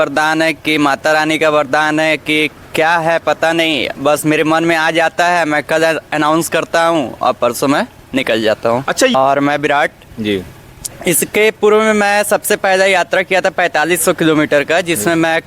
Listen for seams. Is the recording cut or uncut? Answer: cut